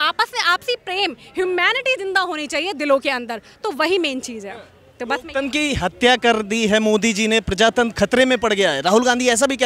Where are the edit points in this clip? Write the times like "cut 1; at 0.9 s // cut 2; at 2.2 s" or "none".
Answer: none